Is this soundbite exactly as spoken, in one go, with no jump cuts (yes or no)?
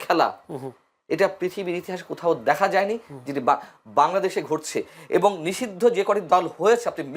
yes